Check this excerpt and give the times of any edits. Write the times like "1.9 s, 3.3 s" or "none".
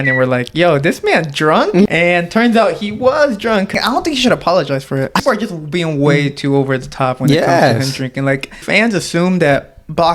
1.9 s, 3.7 s, 5.2 s, 8.6 s